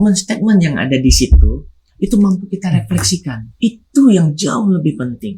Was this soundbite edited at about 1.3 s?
no; 1 cut; at 3.4 s

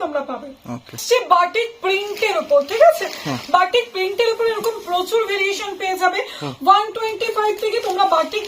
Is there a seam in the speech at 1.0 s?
yes; 1 cut; at 1.0 s

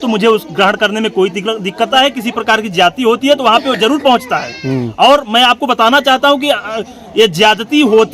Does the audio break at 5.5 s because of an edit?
no; 1 cut; at 1.9 s

